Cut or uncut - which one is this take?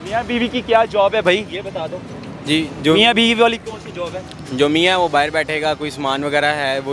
uncut